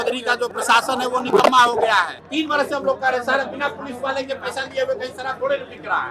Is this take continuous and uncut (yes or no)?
no